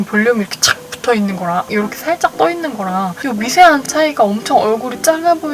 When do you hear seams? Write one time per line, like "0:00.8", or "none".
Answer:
0:01.7
0:03.2